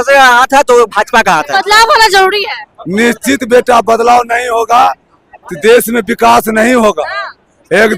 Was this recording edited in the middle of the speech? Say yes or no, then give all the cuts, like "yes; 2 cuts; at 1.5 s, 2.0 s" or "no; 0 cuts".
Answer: yes; 1 cut; at 1.5 s